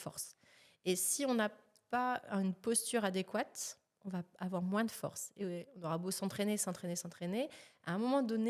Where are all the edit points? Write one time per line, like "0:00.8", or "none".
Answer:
none